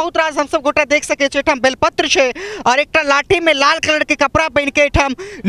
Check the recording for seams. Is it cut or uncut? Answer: uncut